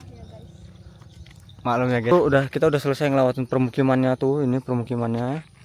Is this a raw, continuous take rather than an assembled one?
no; 1 cut; at 2.1 s

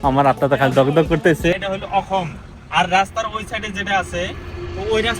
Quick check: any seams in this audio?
yes; 1 cut; at 1.6 s

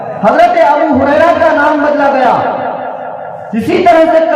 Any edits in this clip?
no; 0 cuts

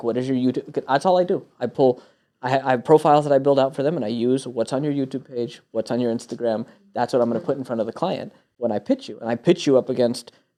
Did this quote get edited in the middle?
no; 0 cuts

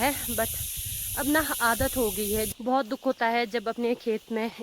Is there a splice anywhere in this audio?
yes; 1 cut; at 2.5 s

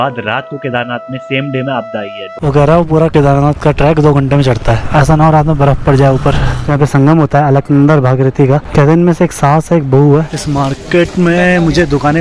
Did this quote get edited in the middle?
yes; 5 cuts; at 2.3 s, 4.8 s, 6.7 s, 8.7 s, 10.3 s

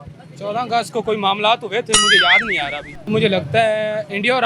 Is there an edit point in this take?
yes; 1 cut; at 3.1 s

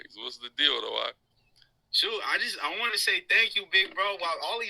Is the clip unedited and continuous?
yes; 0 cuts

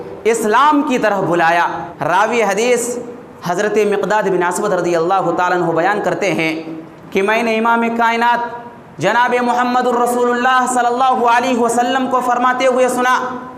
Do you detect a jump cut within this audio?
yes; 1 cut; at 1.9 s

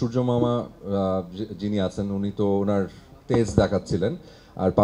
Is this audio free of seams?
yes; 0 cuts

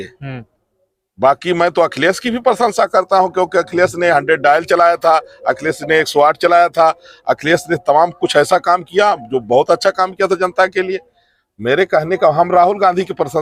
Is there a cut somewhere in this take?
no; 0 cuts

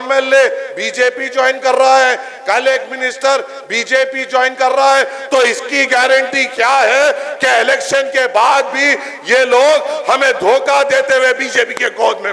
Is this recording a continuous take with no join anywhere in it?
yes; 0 cuts

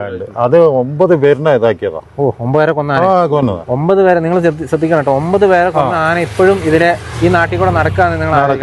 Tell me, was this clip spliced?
no; 0 cuts

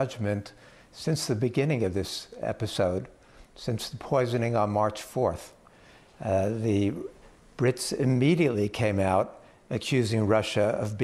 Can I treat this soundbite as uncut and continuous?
no; 1 cut; at 8.4 s

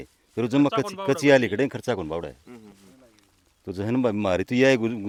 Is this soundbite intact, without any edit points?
yes; 0 cuts

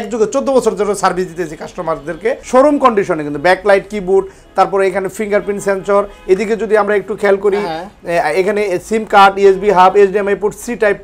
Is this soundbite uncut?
no; 1 cut; at 2.4 s

